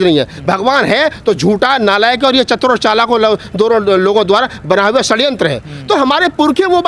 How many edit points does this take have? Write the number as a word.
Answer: zero